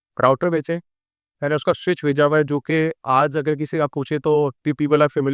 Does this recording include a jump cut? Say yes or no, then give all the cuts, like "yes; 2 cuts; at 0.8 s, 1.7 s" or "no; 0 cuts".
no; 0 cuts